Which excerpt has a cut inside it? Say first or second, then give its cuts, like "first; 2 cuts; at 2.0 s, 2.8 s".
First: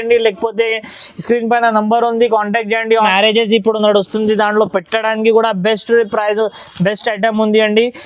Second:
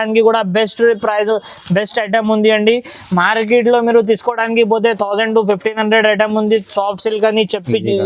first; 1 cut; at 3.1 s